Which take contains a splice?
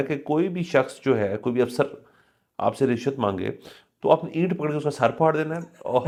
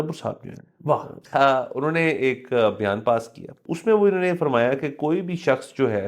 second; 2 cuts; at 1.1 s, 3.6 s

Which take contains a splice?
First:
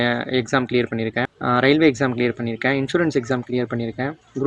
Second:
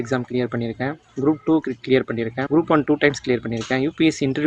second; 1 cut; at 2.4 s

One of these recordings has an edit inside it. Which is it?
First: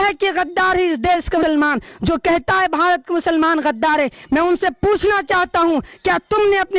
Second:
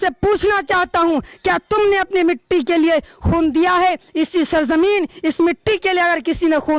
first; 1 cut; at 1.4 s

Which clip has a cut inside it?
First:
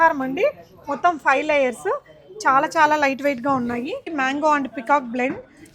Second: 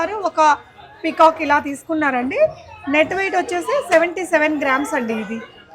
first; 1 cut; at 4.1 s

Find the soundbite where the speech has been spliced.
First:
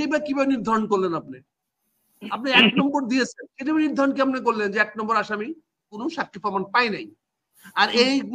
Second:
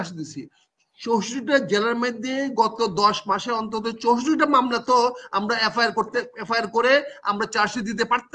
first; 1 cut; at 5.9 s

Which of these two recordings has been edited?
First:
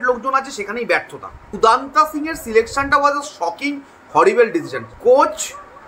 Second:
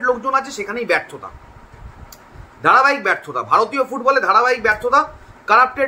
first; 2 cuts; at 1.6 s, 4.8 s

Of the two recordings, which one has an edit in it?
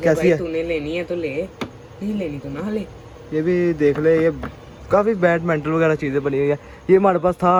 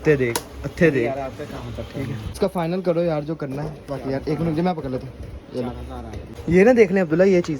second; 2 cuts; at 2.2 s, 6.2 s

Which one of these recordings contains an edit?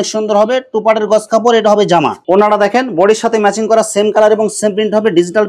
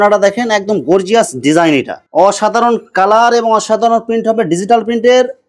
second; 1 cut; at 2.0 s

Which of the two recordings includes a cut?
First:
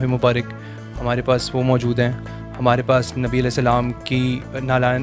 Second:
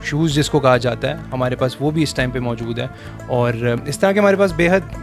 first; 1 cut; at 2.3 s

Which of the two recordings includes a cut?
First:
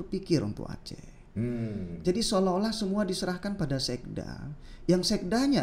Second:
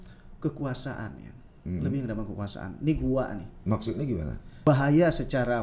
second; 1 cut; at 4.4 s

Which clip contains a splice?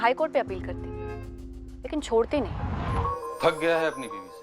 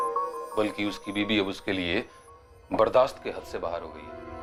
first; 1 cut; at 3.0 s

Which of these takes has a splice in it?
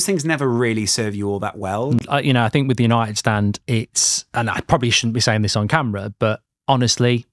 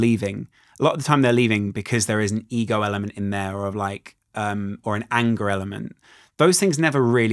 first; 1 cut; at 2.0 s

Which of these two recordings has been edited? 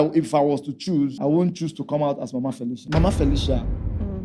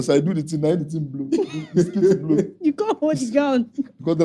first; 2 cuts; at 1.2 s, 2.8 s

